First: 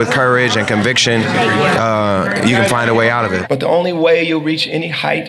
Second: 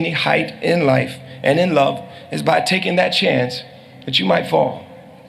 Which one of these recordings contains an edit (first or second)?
first